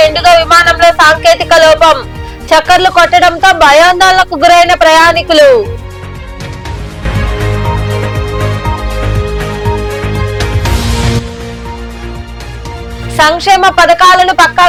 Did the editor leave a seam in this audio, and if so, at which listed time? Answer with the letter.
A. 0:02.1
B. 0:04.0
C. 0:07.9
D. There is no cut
D